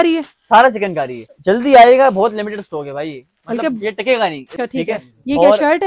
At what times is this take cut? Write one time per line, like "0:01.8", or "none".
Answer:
0:01.3
0:04.5